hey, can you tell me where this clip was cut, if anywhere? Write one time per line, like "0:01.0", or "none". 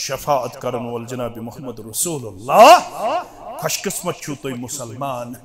none

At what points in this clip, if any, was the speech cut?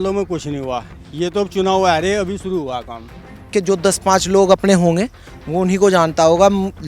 0:03.5

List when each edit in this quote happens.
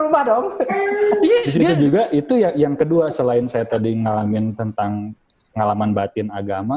0:01.6

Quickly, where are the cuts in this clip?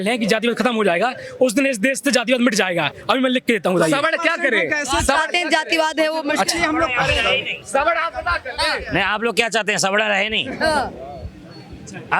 none

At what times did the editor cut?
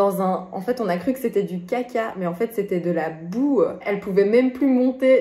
0:03.8

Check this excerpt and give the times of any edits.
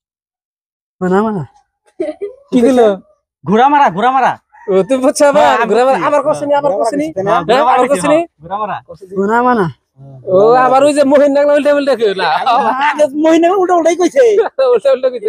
none

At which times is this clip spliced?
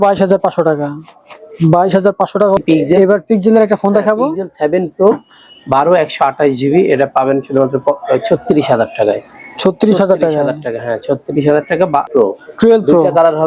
0:02.6
0:12.1

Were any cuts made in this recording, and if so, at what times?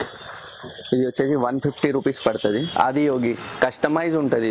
0:02.7
0:03.5

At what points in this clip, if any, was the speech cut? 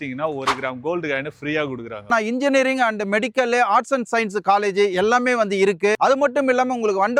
0:02.1
0:06.0

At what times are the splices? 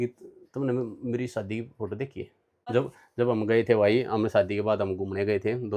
0:02.6

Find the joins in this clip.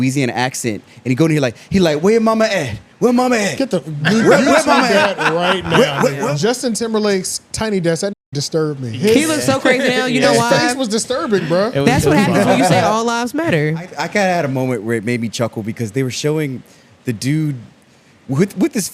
0:06.3
0:14.0

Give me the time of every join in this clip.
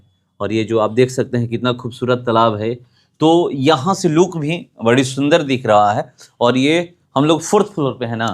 none

